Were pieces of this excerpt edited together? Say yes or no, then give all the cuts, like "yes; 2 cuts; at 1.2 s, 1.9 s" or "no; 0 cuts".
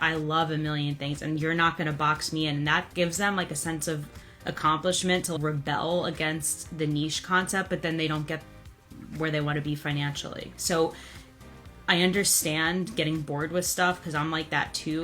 yes; 1 cut; at 5.3 s